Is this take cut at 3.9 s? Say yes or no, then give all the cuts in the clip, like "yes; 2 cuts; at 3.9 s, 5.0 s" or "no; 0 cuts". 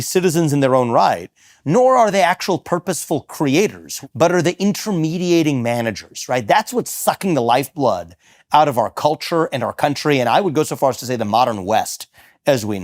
yes; 1 cut; at 3.9 s